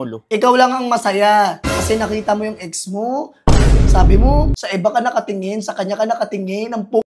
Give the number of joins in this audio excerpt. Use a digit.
1